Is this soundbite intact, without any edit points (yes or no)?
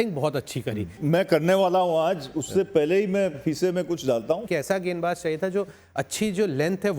no